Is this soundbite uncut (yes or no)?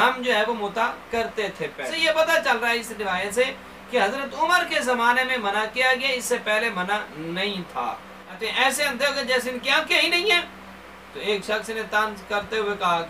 no